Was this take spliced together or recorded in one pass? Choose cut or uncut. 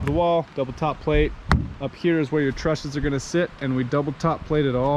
uncut